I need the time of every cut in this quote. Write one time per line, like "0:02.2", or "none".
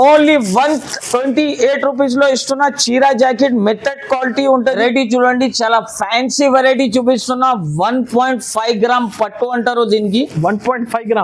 0:04.8